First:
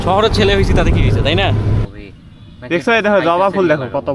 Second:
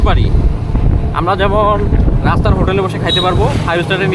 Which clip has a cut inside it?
first; 1 cut; at 1.9 s

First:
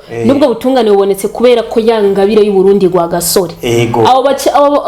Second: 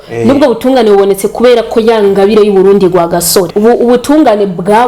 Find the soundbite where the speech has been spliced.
second; 1 cut; at 3.5 s

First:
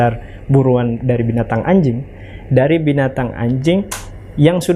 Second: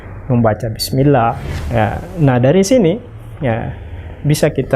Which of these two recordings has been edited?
second; 1 cut; at 1.5 s

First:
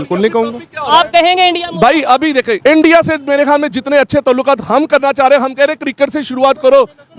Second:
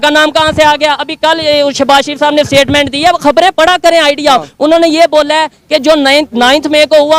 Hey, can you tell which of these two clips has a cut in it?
first; 1 cut; at 2.5 s

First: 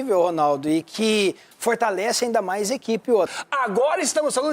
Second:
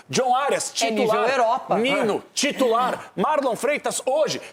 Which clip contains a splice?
first; 1 cut; at 3.4 s

